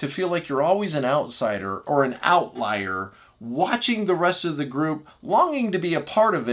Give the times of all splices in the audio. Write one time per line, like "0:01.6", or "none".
none

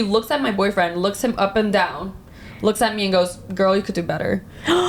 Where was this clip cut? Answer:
none

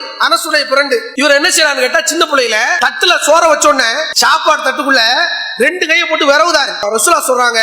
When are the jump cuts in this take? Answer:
0:01.1
0:02.7
0:04.1
0:06.8

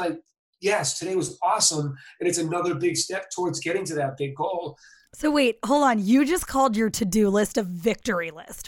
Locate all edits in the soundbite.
0:05.1

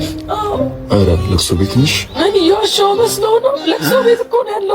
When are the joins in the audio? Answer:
none

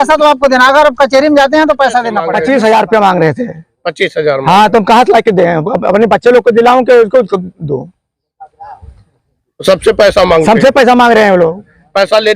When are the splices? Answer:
0:02.3

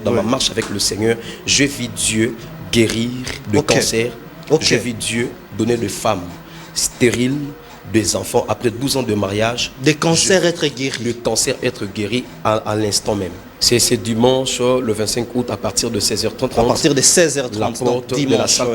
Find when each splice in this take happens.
0:13.4
0:16.5

